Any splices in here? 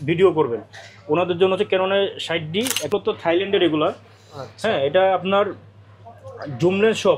yes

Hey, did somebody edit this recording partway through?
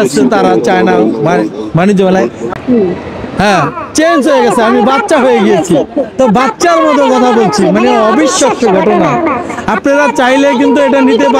yes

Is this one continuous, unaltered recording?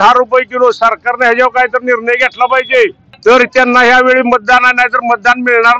no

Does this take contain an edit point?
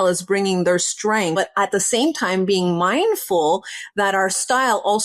yes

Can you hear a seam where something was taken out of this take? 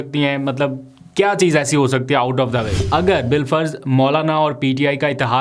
yes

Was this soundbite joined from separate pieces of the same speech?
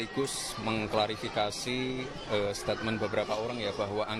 no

